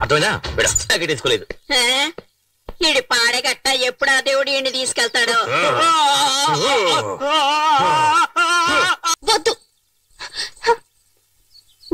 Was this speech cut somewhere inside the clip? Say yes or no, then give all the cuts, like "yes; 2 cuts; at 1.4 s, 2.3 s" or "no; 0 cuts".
yes; 1 cut; at 9.1 s